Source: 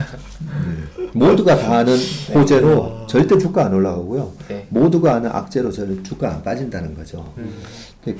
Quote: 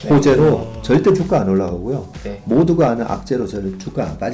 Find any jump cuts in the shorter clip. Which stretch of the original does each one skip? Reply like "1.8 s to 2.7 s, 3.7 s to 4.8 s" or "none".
none